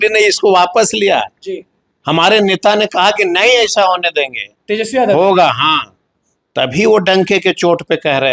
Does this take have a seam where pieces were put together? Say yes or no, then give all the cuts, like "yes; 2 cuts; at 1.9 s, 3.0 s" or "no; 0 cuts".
no; 0 cuts